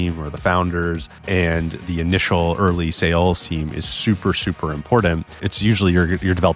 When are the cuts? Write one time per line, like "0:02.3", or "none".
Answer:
0:01.6
0:05.5